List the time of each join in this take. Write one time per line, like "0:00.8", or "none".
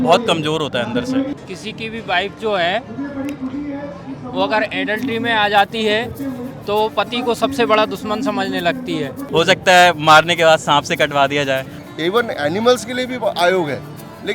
0:01.3
0:09.2
0:11.7